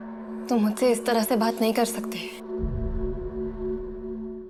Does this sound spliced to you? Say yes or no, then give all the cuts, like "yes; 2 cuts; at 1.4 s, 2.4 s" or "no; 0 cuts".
no; 0 cuts